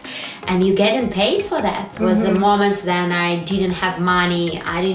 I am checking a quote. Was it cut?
yes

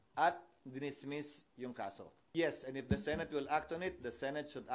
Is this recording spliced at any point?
yes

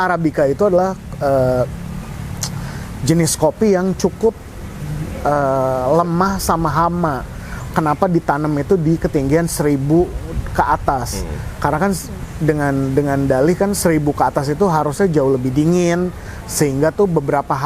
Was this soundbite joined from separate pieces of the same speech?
no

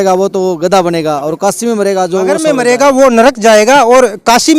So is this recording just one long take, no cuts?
no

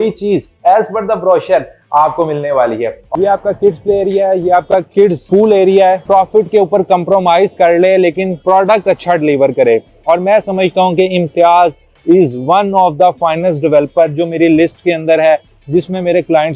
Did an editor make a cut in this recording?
yes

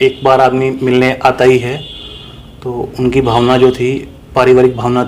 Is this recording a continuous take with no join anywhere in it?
yes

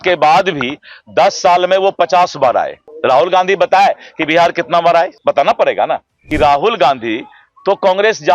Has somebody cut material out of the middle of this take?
yes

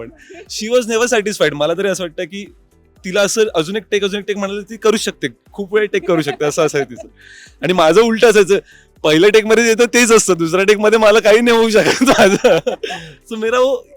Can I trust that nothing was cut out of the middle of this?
yes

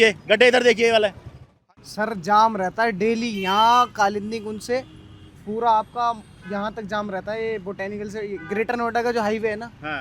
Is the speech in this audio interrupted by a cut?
yes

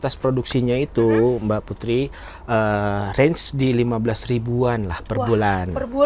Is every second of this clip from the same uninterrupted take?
yes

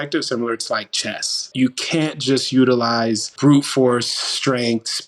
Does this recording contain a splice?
yes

